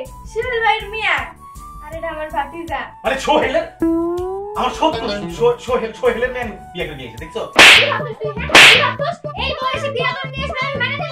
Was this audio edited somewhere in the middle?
yes; 1 cut; at 7.5 s

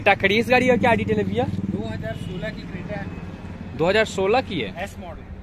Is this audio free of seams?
yes; 0 cuts

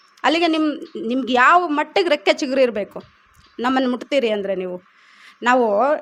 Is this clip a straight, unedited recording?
yes; 0 cuts

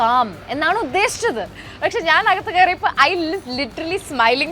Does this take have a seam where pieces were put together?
no; 0 cuts

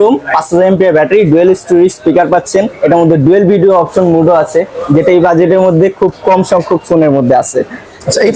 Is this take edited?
no; 0 cuts

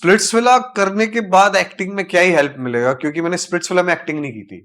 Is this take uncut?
yes; 0 cuts

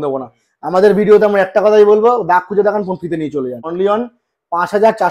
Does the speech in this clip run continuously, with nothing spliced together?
no; 1 cut; at 3.6 s

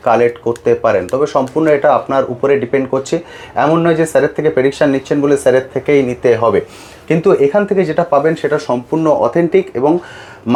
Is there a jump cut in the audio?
no; 0 cuts

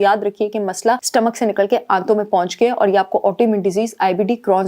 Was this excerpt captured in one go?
no; 1 cut; at 1.0 s

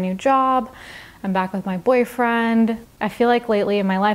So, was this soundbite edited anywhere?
yes; 1 cut; at 2.8 s

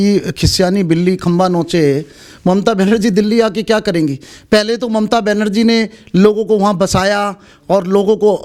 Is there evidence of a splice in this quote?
no; 0 cuts

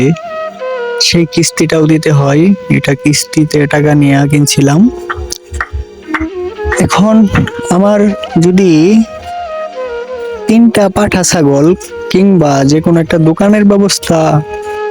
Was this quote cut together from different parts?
no; 0 cuts

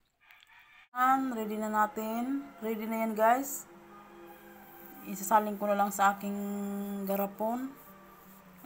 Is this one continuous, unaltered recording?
no; 1 cut; at 1.0 s

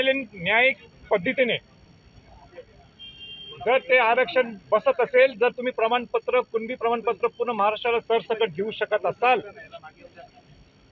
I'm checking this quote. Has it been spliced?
no; 0 cuts

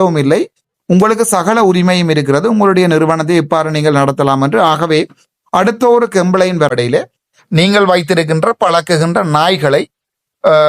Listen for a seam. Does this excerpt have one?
yes; 1 cut; at 6.7 s

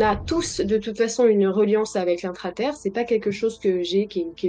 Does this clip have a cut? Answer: no; 0 cuts

